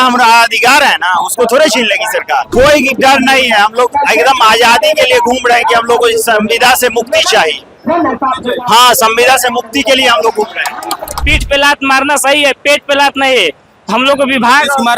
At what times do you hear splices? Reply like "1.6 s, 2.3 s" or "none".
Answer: 2.5 s, 11.2 s

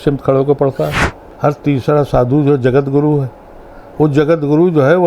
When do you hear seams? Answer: 1.2 s

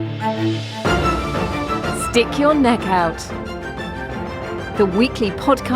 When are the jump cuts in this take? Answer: 2.1 s

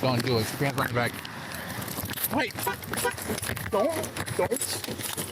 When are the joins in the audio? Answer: 3.0 s

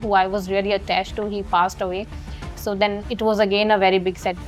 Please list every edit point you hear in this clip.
none

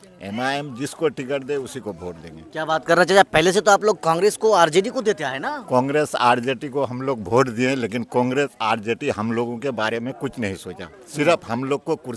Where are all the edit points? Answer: none

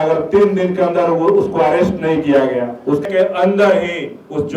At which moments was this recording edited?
3.1 s

